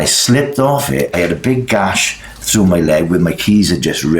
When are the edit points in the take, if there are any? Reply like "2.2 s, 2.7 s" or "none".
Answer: 1.1 s